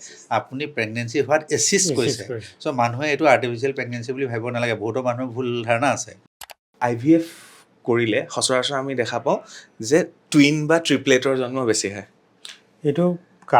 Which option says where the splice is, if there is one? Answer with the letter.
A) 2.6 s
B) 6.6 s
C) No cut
B